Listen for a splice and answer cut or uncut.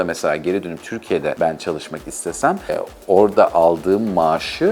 cut